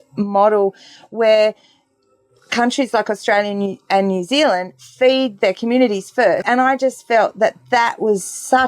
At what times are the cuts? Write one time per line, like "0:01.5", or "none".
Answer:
0:06.4